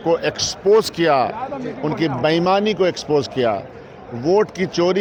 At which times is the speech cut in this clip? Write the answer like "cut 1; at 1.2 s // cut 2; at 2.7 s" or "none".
none